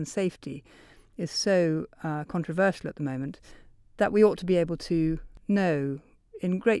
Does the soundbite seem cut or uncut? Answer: cut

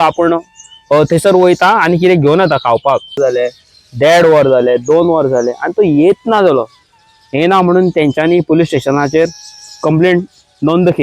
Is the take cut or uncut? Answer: cut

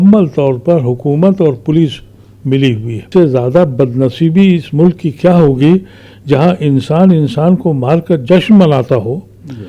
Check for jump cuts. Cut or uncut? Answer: cut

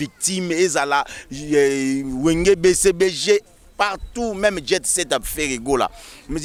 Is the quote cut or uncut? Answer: uncut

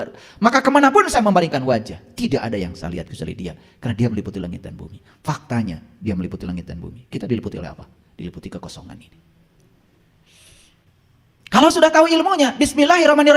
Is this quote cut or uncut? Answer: cut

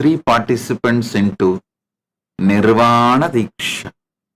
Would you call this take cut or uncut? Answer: uncut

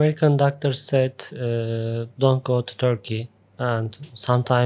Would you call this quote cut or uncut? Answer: uncut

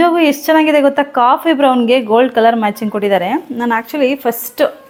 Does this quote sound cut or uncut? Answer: uncut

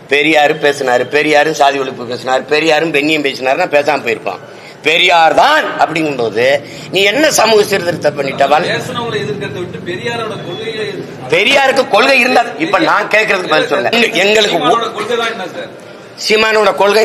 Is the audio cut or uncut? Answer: cut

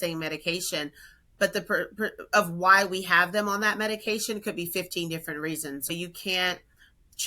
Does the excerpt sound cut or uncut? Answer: cut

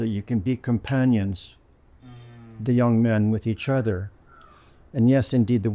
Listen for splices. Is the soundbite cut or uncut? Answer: uncut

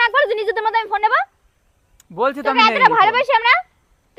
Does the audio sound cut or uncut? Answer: uncut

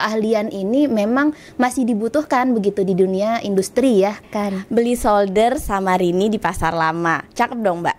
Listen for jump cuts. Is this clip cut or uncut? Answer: cut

